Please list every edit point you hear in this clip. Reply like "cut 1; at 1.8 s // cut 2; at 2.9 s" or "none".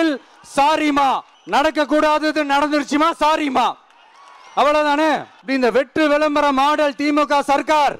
cut 1; at 1.3 s // cut 2; at 5.3 s